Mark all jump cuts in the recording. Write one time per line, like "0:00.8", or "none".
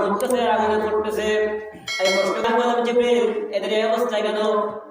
0:02.4